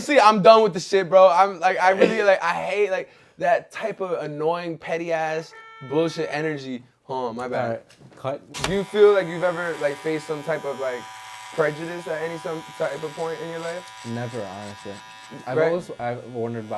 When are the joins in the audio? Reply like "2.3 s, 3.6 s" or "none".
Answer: 8.4 s